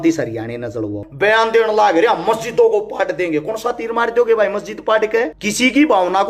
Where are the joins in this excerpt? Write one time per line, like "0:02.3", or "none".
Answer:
0:01.0
0:05.4